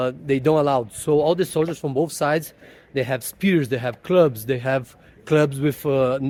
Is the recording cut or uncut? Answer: uncut